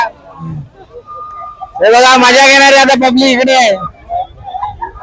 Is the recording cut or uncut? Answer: uncut